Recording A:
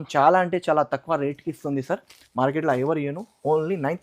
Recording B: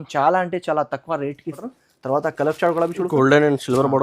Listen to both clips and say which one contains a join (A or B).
B